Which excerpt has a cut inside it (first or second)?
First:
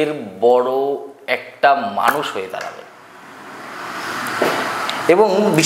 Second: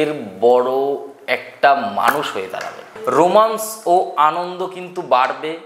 second